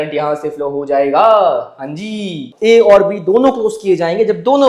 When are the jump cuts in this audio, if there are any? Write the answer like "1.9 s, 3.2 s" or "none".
2.5 s